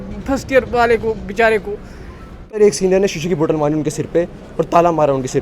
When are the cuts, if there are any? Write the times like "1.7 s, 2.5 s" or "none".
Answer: 2.5 s

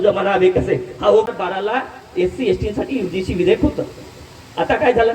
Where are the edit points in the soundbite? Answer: 1.2 s

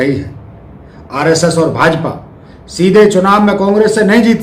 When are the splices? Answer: none

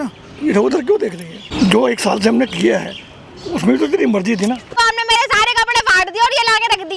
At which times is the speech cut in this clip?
1.5 s, 4.7 s

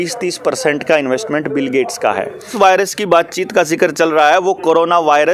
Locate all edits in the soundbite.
2.5 s

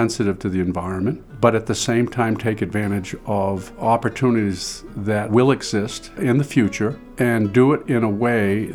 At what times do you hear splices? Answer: 1.3 s, 3.7 s, 5.3 s, 6.2 s, 7.0 s

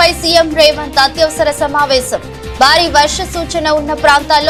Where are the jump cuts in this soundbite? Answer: none

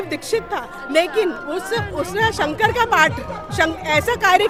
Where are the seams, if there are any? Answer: none

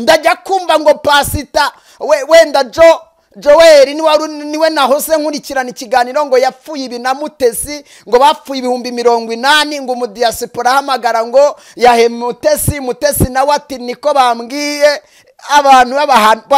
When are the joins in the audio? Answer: none

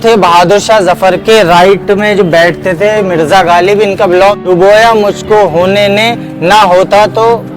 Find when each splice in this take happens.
4.3 s

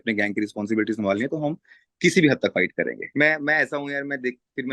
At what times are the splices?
3.0 s

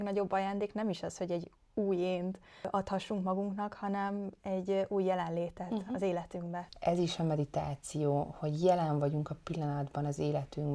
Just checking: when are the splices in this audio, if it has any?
2.7 s, 6.7 s

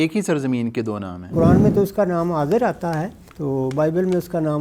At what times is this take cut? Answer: 1.2 s, 3.2 s

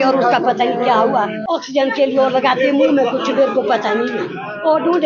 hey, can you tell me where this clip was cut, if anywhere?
1.4 s

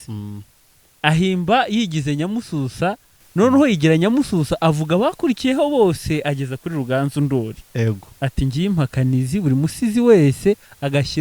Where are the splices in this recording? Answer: 3.2 s

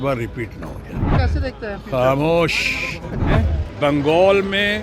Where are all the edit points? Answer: 1.1 s, 3.3 s

